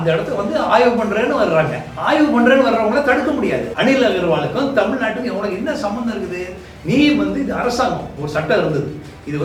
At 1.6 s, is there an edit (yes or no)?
no